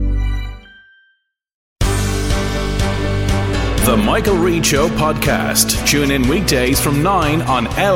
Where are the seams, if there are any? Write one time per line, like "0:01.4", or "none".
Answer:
0:01.6